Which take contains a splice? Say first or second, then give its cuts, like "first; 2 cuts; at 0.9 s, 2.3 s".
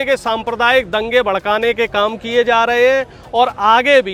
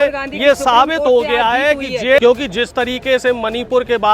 second; 1 cut; at 2.2 s